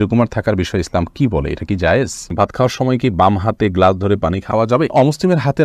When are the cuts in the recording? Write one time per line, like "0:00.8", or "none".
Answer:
0:02.3
0:04.7